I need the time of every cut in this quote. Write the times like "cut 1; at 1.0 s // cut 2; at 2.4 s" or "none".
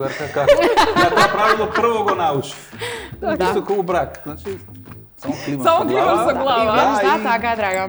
none